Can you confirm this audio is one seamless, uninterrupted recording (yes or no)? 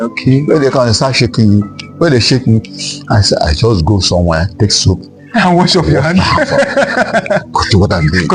yes